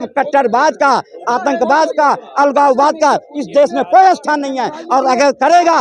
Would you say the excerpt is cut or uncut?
uncut